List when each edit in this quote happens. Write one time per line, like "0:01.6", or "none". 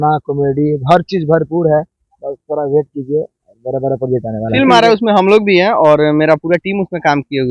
0:04.5